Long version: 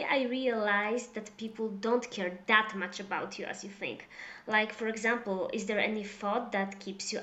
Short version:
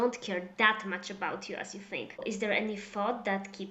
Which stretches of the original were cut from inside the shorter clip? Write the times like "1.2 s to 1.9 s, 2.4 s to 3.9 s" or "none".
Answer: 4.1 s to 5.5 s